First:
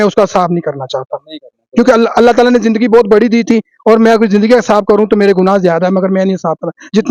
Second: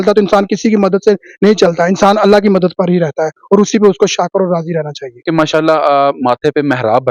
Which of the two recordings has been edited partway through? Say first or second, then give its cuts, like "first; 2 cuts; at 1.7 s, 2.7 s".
second; 1 cut; at 5.2 s